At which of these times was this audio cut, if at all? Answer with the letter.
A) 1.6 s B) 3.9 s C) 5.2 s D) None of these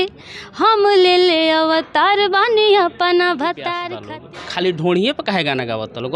B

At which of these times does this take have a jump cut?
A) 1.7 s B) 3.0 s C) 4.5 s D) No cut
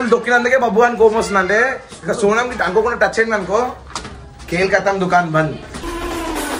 D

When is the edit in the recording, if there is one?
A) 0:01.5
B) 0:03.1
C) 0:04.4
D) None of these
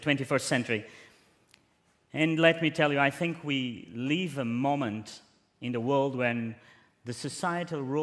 D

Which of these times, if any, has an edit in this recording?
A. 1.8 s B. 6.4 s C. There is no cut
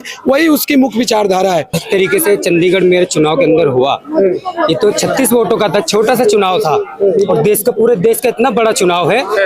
A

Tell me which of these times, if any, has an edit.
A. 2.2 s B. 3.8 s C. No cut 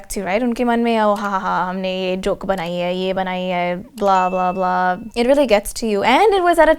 C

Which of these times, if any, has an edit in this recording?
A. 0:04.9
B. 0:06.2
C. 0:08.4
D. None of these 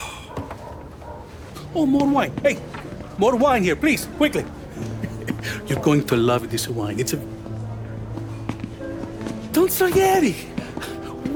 D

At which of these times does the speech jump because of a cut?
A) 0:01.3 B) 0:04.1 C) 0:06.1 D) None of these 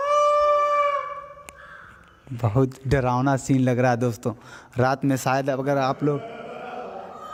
D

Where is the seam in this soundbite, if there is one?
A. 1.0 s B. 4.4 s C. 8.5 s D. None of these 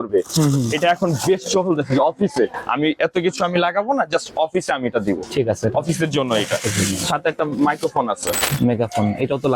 C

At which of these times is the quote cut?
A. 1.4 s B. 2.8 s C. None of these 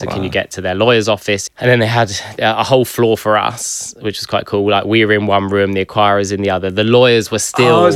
A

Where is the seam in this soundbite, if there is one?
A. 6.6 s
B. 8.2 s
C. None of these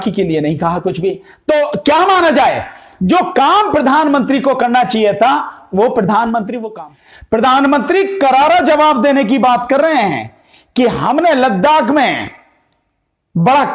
A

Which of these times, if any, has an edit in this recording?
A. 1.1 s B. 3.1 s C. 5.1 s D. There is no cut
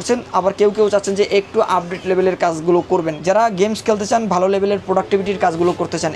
B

